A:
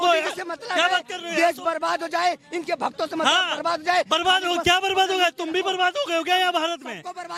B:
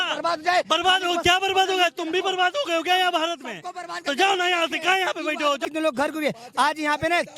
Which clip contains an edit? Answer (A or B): B